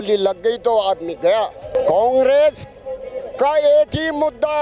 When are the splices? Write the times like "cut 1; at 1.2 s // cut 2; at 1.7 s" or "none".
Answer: cut 1; at 1.7 s